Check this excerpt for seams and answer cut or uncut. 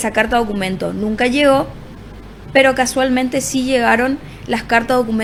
uncut